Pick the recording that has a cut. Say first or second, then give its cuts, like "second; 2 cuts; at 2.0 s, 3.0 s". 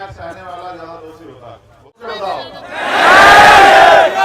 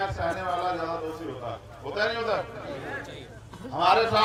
first; 1 cut; at 2.0 s